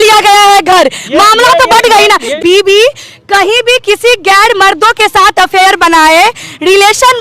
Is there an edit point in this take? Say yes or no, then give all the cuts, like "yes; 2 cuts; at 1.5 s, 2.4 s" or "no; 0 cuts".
yes; 1 cut; at 2.3 s